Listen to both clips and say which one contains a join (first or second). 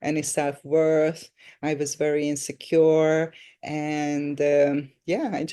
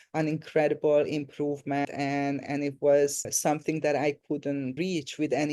second